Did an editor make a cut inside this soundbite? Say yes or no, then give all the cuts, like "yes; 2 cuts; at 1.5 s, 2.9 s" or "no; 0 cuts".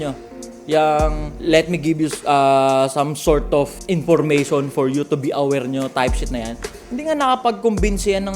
yes; 2 cuts; at 1.3 s, 3.8 s